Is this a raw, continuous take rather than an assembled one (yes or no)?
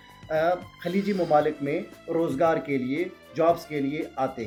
yes